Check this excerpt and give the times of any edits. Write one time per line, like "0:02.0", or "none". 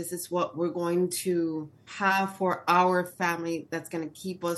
0:01.9